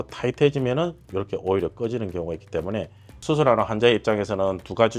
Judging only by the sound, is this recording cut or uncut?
cut